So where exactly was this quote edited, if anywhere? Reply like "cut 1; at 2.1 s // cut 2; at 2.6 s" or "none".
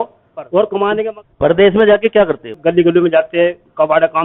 cut 1; at 1.1 s // cut 2; at 2.6 s